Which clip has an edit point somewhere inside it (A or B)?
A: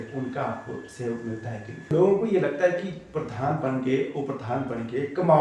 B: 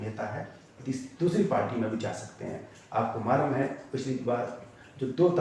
A